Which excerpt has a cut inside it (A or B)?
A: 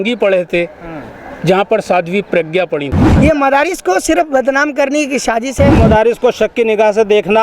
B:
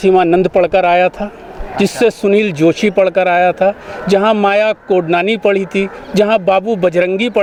A